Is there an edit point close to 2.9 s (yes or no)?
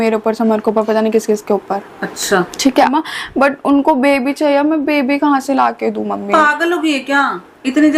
yes